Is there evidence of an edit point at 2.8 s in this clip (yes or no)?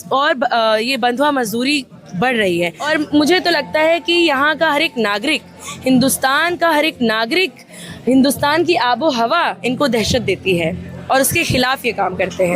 yes